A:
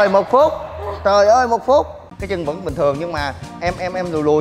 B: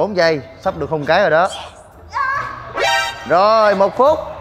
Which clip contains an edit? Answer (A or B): A